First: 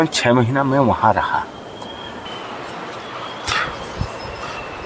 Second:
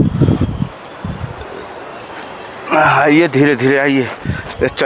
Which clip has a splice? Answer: first; 1 cut; at 2.3 s

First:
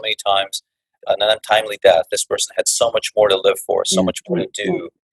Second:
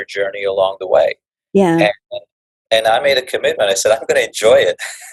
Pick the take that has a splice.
first; 1 cut; at 0.9 s

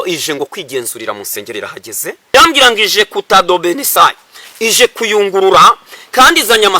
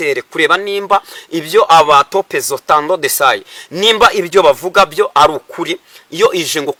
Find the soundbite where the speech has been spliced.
first; 1 cut; at 2.3 s

